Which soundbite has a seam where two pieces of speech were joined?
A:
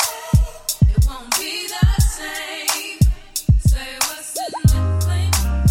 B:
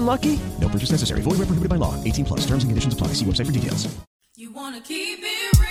B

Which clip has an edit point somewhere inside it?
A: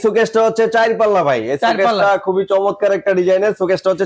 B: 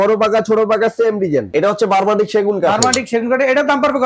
B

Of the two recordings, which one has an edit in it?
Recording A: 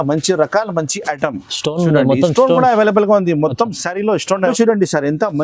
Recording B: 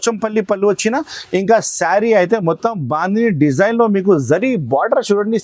A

